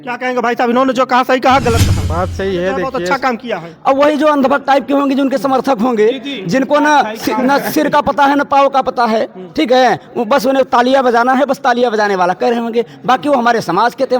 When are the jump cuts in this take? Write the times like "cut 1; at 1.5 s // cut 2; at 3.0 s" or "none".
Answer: cut 1; at 3.0 s

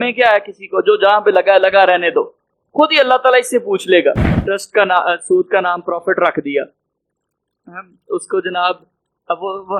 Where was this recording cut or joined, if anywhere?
cut 1; at 4.3 s

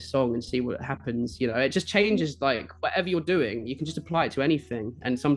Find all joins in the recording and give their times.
none

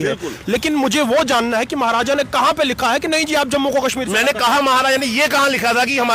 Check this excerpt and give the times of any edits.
none

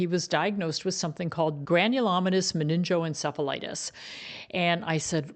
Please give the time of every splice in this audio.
cut 1; at 1.6 s

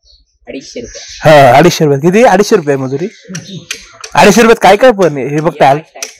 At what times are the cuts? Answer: none

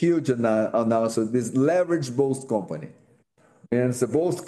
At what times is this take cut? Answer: none

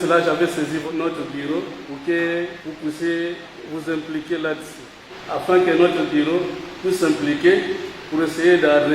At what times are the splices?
cut 1; at 0.8 s // cut 2; at 1.8 s // cut 3; at 2.6 s // cut 4; at 3.5 s // cut 5; at 5.1 s // cut 6; at 6.6 s

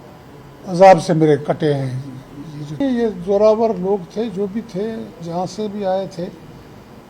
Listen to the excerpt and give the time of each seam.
cut 1; at 2.8 s

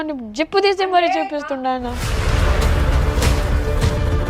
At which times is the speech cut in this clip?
cut 1; at 2.1 s

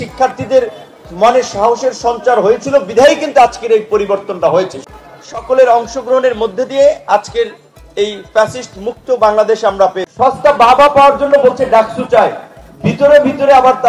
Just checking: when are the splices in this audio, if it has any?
cut 1; at 4.8 s // cut 2; at 10.0 s

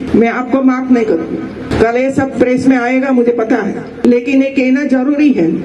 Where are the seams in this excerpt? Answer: none

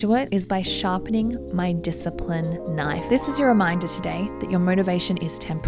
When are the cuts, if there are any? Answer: cut 1; at 3.0 s

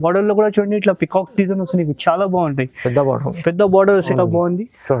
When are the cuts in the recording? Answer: cut 1; at 4.1 s

